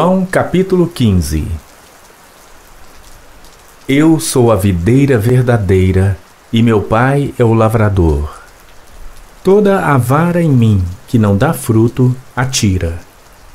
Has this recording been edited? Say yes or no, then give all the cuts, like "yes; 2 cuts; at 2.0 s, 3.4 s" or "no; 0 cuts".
yes; 2 cuts; at 1.6 s, 3.9 s